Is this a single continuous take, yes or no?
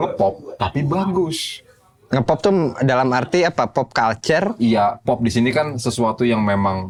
yes